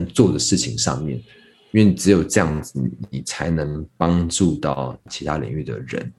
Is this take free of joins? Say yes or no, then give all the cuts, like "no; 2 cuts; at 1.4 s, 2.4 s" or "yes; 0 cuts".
no; 1 cut; at 5.1 s